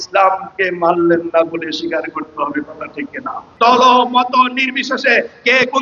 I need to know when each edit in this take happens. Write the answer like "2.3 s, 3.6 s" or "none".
3.4 s